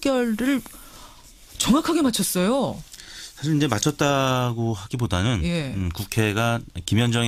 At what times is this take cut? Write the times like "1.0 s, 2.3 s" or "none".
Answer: none